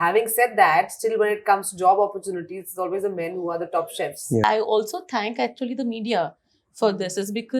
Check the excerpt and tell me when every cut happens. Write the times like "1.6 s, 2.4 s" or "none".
4.4 s